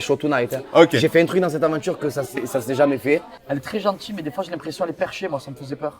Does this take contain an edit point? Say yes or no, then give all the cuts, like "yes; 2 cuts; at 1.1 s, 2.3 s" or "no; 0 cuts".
yes; 1 cut; at 3.4 s